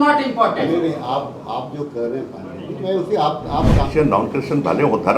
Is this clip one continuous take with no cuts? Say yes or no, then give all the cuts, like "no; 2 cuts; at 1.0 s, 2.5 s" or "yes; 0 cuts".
no; 1 cut; at 3.9 s